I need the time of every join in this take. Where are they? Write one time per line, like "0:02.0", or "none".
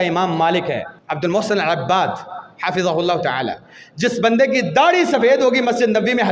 0:01.0